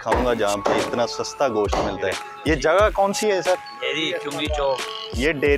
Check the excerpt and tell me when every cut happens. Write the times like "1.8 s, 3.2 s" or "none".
2.2 s